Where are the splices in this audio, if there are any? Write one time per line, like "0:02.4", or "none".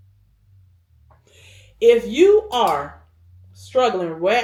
none